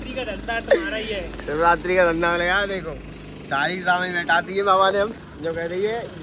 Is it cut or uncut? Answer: uncut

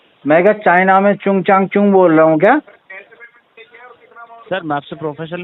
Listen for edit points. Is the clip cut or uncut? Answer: uncut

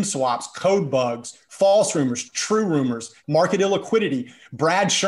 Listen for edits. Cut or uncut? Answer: cut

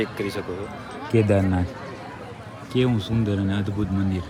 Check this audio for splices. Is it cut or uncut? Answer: uncut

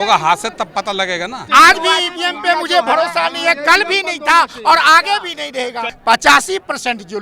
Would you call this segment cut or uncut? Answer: cut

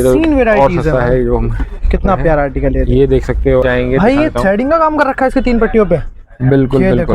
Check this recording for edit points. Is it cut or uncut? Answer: cut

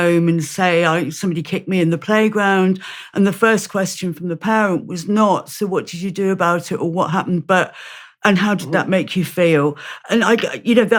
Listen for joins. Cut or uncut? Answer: uncut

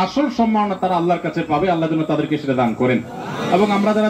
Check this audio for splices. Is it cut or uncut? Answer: uncut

